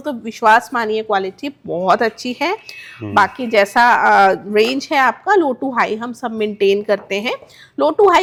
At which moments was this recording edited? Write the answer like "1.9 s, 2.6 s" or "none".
none